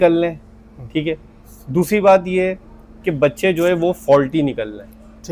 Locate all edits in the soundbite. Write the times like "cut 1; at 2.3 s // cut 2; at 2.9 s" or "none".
none